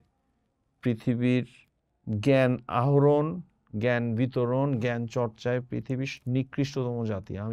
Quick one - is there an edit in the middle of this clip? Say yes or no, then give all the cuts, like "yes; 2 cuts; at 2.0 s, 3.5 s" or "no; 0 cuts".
no; 0 cuts